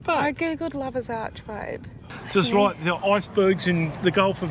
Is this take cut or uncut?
cut